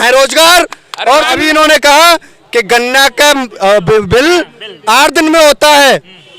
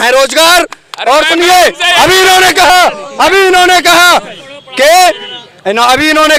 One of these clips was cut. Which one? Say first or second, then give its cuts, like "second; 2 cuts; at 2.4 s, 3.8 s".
first; 1 cut; at 1.3 s